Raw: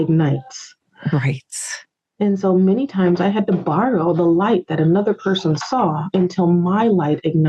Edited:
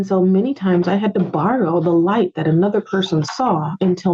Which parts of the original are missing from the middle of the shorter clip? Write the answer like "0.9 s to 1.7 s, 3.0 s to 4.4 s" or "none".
none